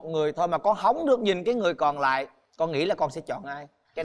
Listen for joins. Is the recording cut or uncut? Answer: uncut